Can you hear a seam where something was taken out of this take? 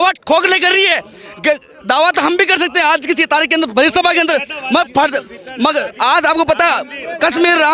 no; 0 cuts

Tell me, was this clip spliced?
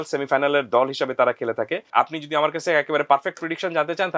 yes; 1 cut; at 1.9 s

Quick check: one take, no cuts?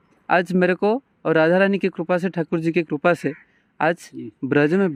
yes; 0 cuts

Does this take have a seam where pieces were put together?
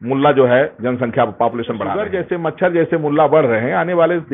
yes; 1 cut; at 2.1 s

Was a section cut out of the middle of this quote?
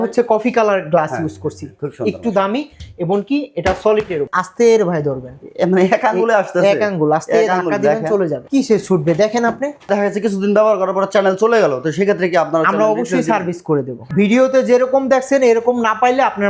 yes; 4 cuts; at 4.3 s, 8.4 s, 9.9 s, 14.0 s

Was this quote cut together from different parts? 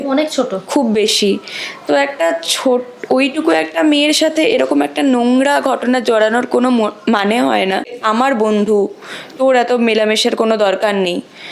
yes; 1 cut; at 8.0 s

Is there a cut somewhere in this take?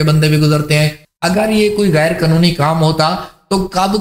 yes; 1 cut; at 1.1 s

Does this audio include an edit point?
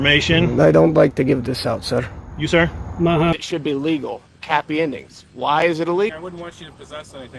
yes; 2 cuts; at 3.3 s, 6.1 s

